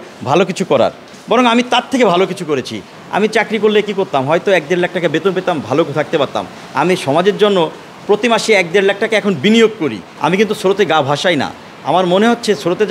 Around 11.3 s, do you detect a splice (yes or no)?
no